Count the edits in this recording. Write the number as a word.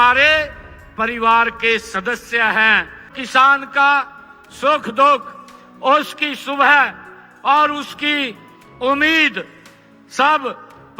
one